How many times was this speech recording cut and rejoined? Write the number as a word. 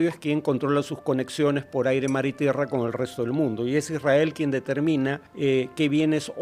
one